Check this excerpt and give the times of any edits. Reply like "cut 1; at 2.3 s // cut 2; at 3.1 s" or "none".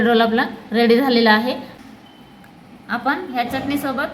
cut 1; at 1.7 s

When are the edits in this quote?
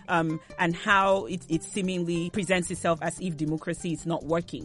cut 1; at 2.3 s

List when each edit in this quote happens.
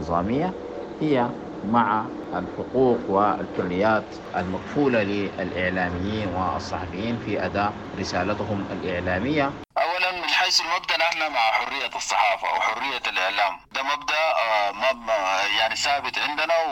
cut 1; at 2.2 s // cut 2; at 4.2 s // cut 3; at 7.8 s // cut 4; at 9.6 s // cut 5; at 13.7 s

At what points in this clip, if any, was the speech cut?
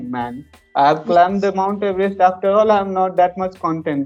none

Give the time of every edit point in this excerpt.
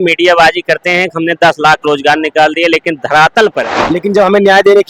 cut 1; at 3.7 s

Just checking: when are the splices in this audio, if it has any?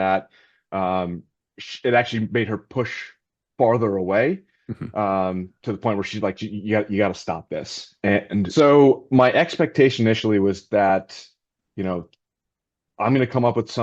cut 1; at 8.5 s

